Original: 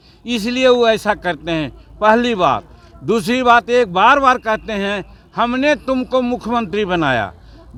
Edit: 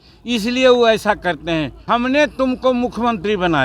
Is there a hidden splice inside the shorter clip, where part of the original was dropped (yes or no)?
yes